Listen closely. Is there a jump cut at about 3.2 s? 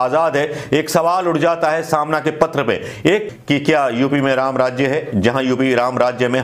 yes; 1 cut; at 3.2 s

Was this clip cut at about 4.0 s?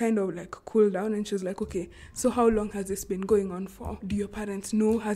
yes; 1 cut; at 4.0 s

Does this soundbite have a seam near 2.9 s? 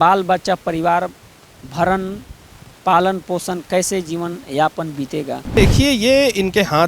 no; 1 cut; at 5.6 s

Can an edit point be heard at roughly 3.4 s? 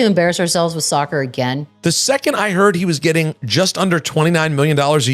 yes; 2 cuts; at 1.7 s, 3.4 s

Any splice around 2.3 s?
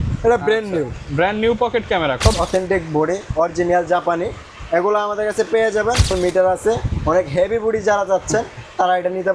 yes; 2 cuts; at 2.3 s, 6.1 s

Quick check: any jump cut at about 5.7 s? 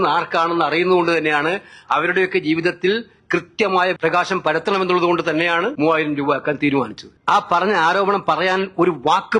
yes; 3 cuts; at 4.0 s, 5.7 s, 7.1 s

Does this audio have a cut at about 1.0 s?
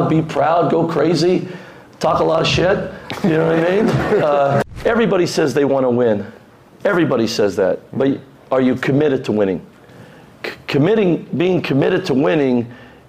no; 1 cut; at 4.7 s

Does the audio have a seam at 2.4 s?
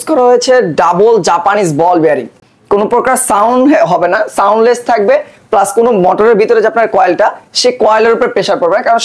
yes; 1 cut; at 2.4 s

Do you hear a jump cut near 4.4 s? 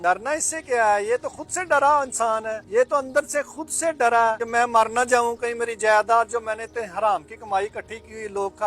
yes; 2 cuts; at 2.6 s, 4.4 s

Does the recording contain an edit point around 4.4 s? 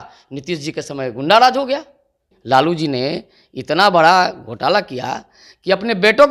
no; 1 cut; at 2.3 s

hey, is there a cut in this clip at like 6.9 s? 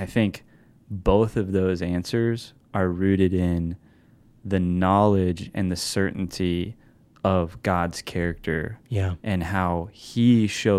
no; 0 cuts

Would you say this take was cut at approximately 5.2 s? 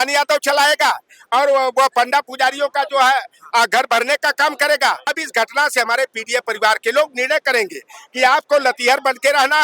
yes; 1 cut; at 5.2 s

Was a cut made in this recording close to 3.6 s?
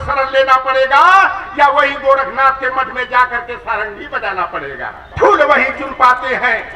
no; 1 cut; at 5.0 s

